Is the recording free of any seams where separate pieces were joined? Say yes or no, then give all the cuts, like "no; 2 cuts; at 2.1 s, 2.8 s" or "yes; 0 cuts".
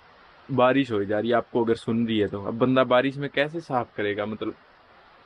yes; 0 cuts